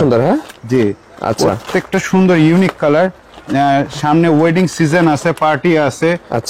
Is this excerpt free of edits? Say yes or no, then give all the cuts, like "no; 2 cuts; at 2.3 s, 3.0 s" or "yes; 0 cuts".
yes; 0 cuts